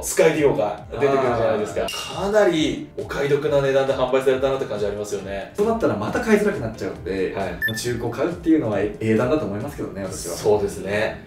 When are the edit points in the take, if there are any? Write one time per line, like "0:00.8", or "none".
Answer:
0:01.9
0:05.4
0:07.6